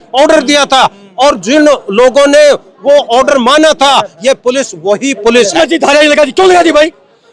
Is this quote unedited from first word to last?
no; 1 cut; at 5.6 s

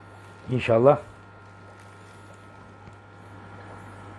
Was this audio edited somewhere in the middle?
no; 0 cuts

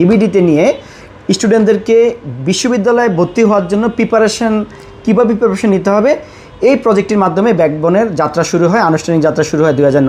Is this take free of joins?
yes; 0 cuts

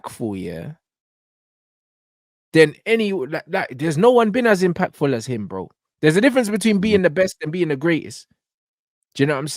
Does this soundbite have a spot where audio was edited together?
no; 0 cuts

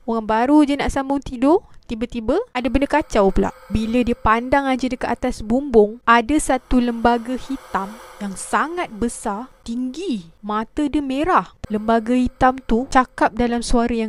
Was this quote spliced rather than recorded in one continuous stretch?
yes; 6 cuts; at 2.5 s, 6.0 s, 9.5 s, 10.3 s, 11.6 s, 12.9 s

